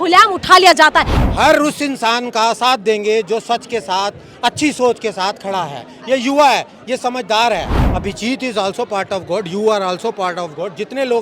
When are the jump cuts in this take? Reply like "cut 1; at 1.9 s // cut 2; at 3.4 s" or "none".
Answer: cut 1; at 1.1 s // cut 2; at 7.8 s